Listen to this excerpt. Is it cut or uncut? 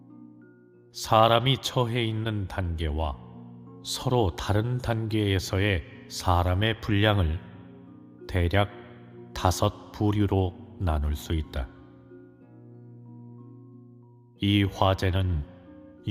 uncut